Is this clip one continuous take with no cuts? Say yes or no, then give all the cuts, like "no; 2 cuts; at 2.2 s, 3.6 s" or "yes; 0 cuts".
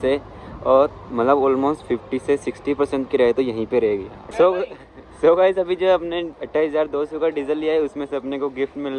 no; 1 cut; at 4.2 s